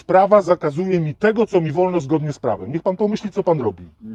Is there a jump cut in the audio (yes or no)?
no